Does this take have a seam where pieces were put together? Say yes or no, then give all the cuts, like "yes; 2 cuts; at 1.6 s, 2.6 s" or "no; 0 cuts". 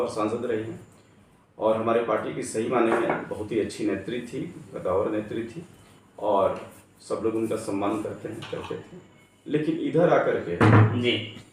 no; 0 cuts